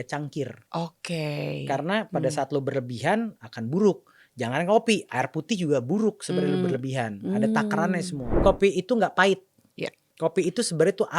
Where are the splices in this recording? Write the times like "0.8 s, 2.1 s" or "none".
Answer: 8.4 s